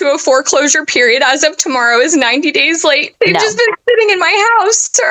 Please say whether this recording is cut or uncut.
cut